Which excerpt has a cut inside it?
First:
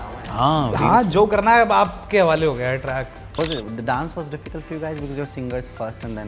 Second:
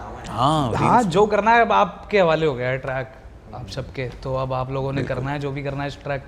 first; 1 cut; at 3.2 s

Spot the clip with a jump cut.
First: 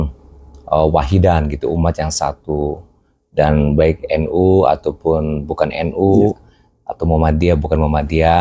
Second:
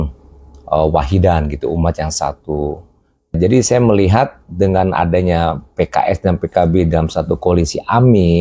second; 1 cut; at 3.4 s

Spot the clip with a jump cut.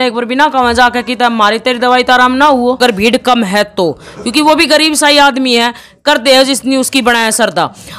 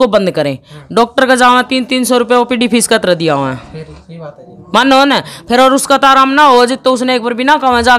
first; 1 cut; at 2.8 s

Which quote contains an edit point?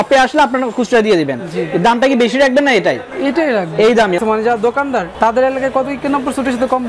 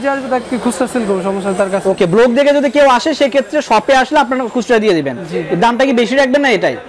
first; 1 cut; at 4.2 s

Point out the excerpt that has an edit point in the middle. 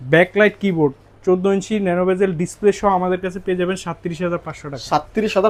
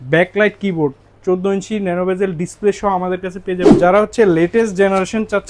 second; 1 cut; at 3.6 s

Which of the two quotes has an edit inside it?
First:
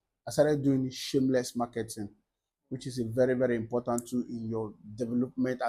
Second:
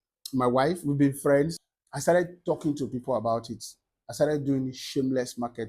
second; 1 cut; at 1.7 s

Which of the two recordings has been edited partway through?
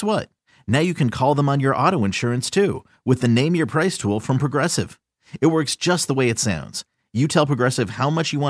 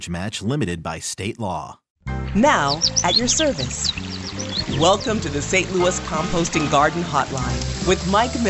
second; 1 cut; at 2.1 s

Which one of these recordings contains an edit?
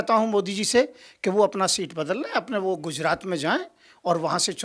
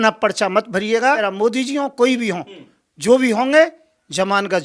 second; 1 cut; at 1.2 s

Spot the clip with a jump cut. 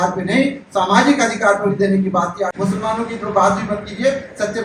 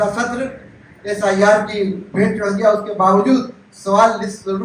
first; 1 cut; at 2.5 s

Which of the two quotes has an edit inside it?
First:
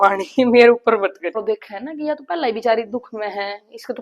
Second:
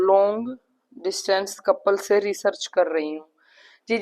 first; 1 cut; at 1.4 s

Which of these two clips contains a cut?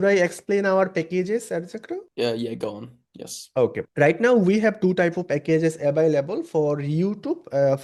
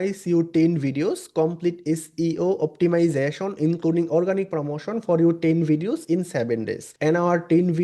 second; 1 cut; at 6.8 s

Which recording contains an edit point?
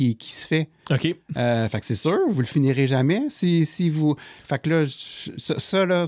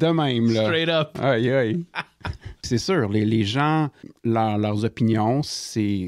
second; 2 cuts; at 2.7 s, 4.1 s

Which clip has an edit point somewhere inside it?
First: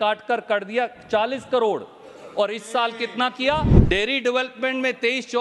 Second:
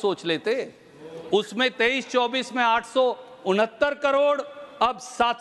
first; 1 cut; at 3.8 s

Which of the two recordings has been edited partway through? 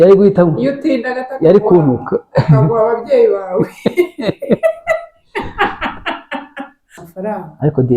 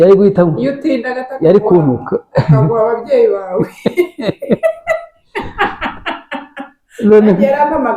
first; 1 cut; at 6.9 s

